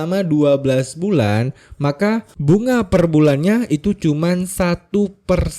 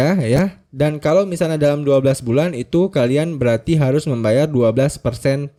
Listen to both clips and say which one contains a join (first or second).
first